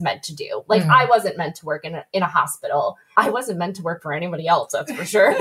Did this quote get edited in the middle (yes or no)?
yes